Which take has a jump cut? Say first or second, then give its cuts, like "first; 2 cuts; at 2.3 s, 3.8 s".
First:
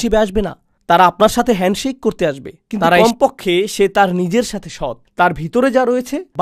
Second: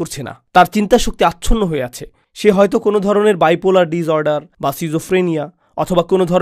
first; 1 cut; at 3.0 s